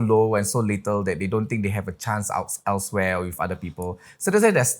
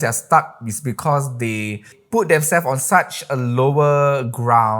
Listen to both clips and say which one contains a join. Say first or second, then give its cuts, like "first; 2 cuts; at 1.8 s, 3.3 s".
second; 1 cut; at 1.9 s